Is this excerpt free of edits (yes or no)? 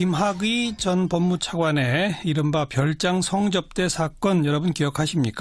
yes